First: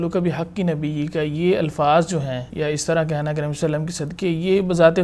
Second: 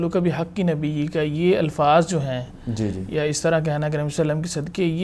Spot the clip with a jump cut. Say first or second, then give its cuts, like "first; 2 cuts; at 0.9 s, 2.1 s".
first; 1 cut; at 2.5 s